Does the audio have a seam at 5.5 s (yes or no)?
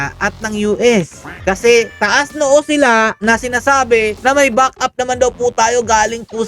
no